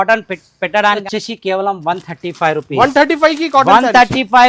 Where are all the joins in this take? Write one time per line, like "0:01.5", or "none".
0:01.0